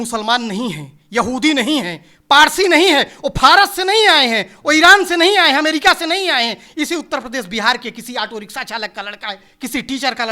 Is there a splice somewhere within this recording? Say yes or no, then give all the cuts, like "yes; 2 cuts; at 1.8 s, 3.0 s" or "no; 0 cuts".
no; 0 cuts